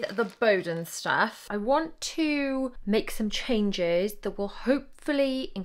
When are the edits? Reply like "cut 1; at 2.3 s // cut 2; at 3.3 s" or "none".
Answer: cut 1; at 1.4 s // cut 2; at 2.8 s